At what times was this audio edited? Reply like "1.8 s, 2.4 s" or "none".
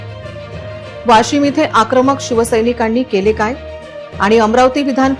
1.0 s

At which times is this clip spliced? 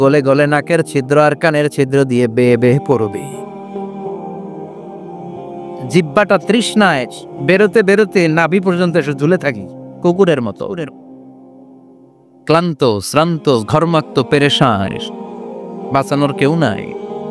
none

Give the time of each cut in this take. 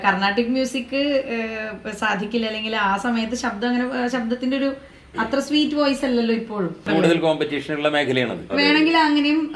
6.9 s

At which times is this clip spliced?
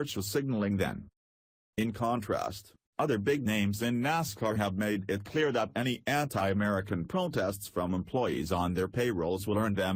none

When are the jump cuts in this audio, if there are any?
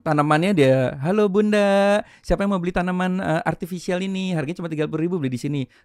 none

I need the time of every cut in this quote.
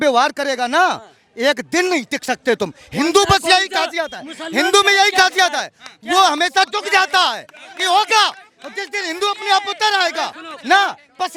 none

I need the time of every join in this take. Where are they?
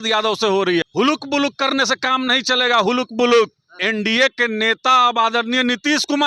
0.8 s, 3.8 s

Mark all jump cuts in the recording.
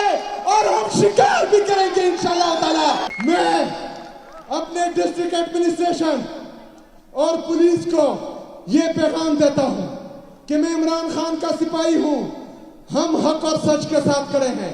3.1 s

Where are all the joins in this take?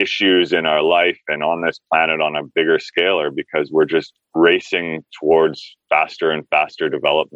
none

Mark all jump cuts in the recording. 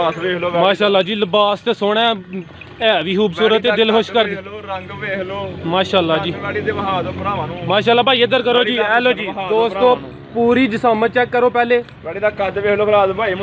none

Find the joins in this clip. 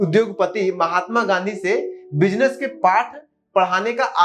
none

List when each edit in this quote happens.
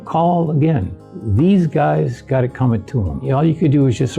3.3 s

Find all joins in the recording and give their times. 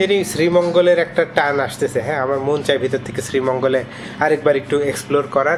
none

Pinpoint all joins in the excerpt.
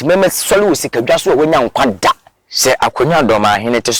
2.3 s

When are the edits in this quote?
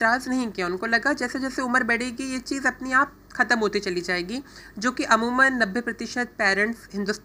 none

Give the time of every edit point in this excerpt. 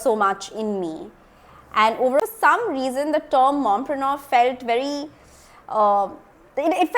2.2 s

